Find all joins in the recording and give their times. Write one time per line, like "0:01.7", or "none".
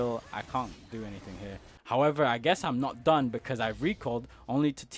0:01.7